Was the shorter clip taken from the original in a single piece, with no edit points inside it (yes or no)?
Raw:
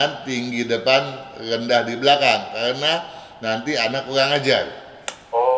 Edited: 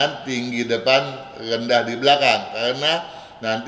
yes